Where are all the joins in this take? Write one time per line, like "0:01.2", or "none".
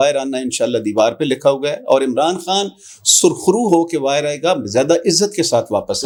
none